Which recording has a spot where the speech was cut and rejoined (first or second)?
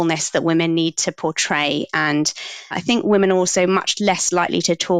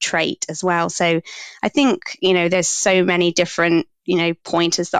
first